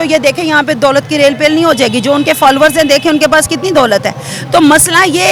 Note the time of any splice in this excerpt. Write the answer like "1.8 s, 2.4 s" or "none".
none